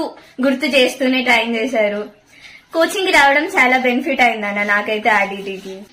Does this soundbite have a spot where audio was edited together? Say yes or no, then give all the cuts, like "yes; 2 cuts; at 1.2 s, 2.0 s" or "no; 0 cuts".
no; 0 cuts